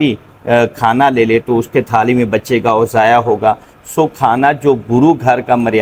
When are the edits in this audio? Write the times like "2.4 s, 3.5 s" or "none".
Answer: none